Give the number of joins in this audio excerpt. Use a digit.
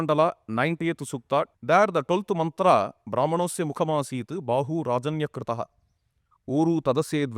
1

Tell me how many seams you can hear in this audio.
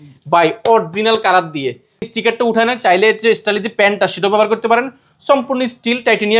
1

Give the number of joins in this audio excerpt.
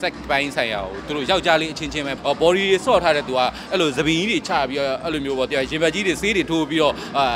1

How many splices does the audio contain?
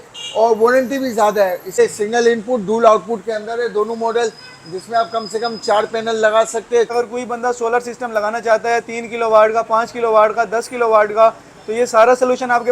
2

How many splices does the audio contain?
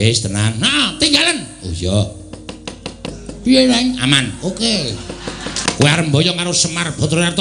2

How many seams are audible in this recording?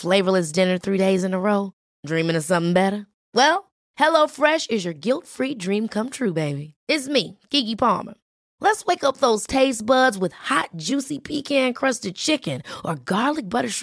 0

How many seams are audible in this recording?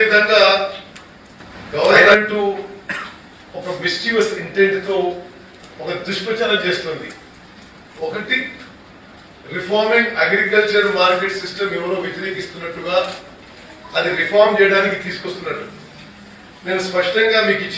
0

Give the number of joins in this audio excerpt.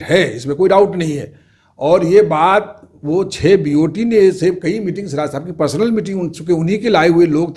0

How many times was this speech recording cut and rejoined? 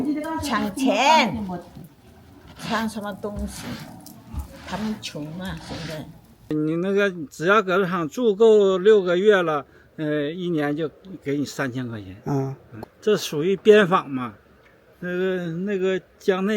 2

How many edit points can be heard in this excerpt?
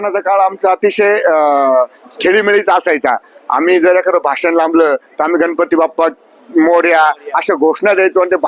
0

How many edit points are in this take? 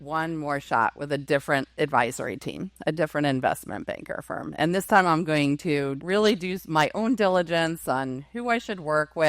1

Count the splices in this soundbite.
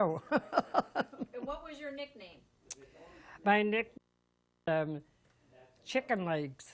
1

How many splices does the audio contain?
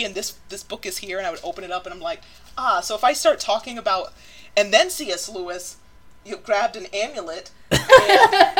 0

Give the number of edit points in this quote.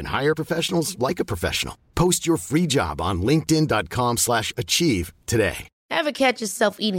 1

